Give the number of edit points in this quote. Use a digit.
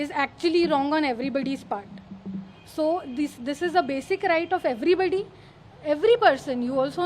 0